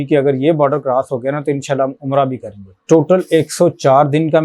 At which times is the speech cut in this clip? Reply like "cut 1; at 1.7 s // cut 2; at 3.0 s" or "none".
cut 1; at 2.8 s